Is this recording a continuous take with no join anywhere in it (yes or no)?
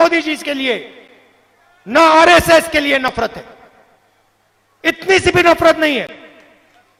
yes